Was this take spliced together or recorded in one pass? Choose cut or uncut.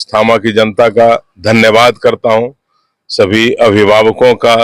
uncut